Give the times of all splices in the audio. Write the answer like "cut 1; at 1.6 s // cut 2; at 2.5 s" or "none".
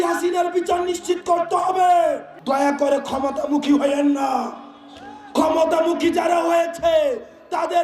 cut 1; at 2.3 s